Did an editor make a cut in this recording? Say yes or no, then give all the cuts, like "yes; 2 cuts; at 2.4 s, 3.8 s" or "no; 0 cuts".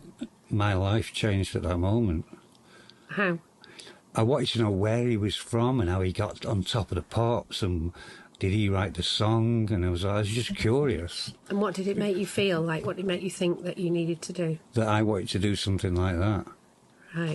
no; 0 cuts